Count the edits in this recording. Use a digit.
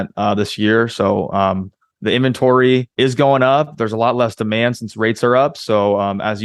1